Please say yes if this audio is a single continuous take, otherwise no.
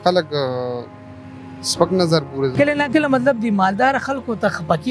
no